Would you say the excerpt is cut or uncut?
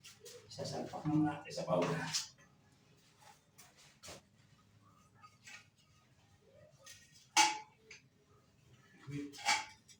uncut